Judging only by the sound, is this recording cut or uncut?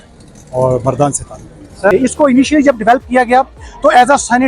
cut